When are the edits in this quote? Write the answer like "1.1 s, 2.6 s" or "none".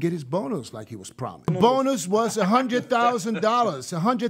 1.5 s